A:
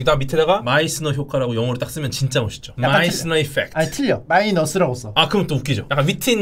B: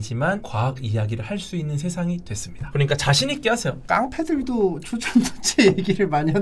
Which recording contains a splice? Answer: B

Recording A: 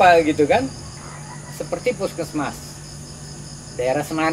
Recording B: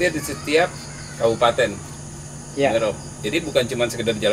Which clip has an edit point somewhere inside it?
A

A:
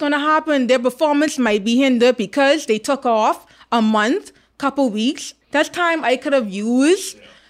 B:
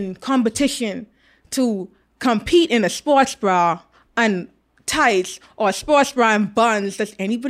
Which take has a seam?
A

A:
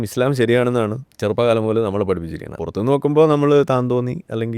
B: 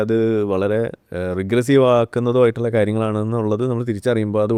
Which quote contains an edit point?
A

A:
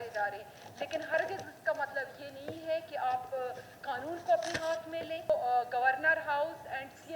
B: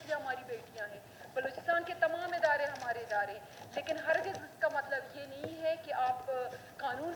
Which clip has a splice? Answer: A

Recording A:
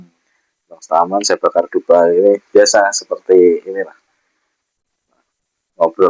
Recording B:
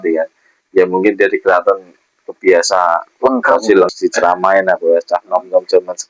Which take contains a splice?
B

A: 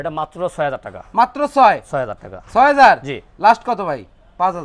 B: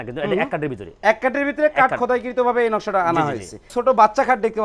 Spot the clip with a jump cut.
B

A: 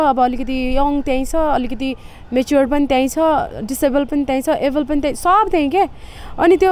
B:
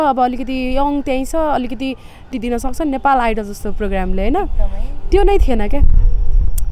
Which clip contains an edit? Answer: B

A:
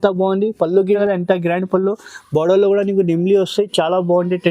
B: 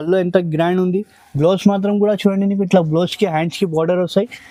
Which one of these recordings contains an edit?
A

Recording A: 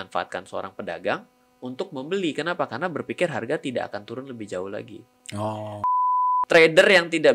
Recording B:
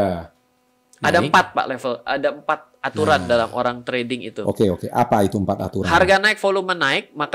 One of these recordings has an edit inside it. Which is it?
A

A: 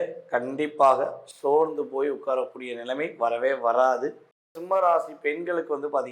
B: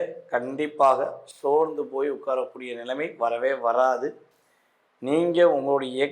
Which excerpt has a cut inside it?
A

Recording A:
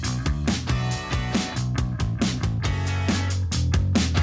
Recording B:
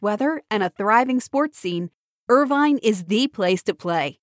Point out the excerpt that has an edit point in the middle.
A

